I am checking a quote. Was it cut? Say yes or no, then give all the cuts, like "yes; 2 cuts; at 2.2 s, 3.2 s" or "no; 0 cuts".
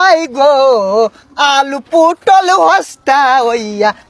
no; 0 cuts